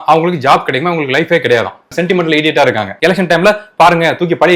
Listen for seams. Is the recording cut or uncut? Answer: cut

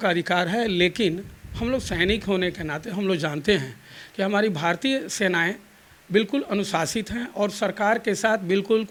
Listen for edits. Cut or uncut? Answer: uncut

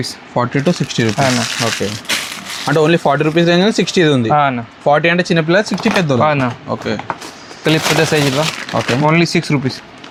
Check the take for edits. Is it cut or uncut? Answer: uncut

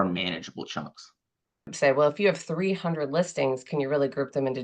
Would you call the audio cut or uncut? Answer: cut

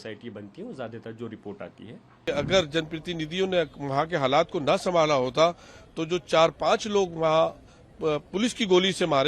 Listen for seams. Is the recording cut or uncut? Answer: cut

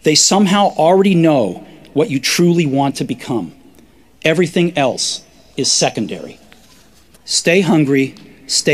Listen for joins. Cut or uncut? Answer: cut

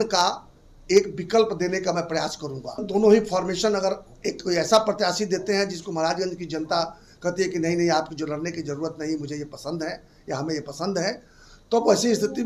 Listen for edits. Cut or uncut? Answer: cut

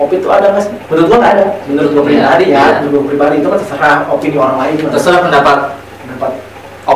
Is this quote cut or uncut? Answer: uncut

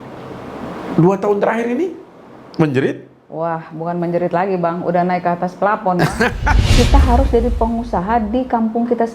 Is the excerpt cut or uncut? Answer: cut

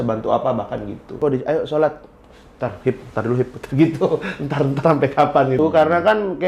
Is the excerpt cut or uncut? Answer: cut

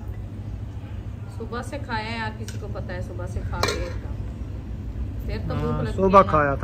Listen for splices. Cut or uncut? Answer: uncut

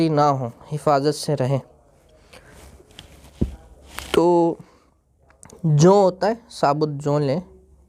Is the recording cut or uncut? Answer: uncut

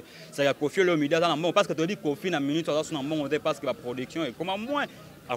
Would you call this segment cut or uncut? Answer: uncut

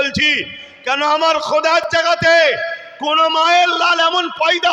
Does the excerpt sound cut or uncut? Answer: uncut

